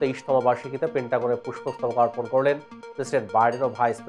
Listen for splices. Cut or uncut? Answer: uncut